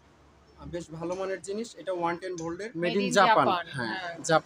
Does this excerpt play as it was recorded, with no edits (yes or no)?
no